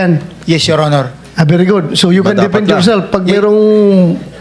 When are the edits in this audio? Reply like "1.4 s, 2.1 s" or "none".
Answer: none

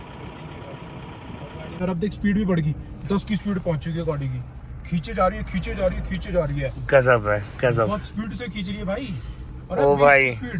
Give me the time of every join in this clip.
1.8 s

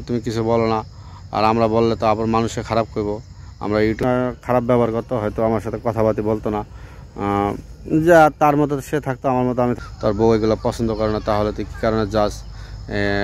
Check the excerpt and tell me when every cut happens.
4.0 s, 9.8 s

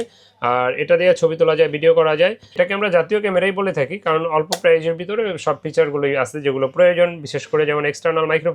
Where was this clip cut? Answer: 2.5 s

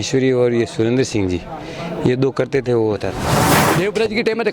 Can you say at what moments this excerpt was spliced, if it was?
3.6 s

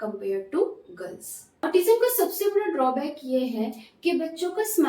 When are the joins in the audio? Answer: 1.6 s

